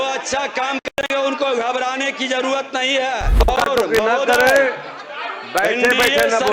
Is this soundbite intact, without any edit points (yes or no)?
no